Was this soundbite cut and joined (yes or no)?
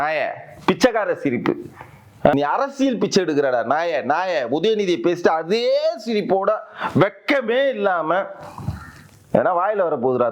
yes